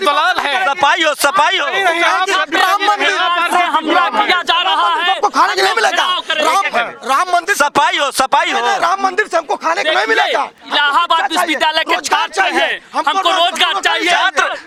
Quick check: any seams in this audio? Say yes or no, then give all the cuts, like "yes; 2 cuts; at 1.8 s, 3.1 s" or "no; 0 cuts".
no; 0 cuts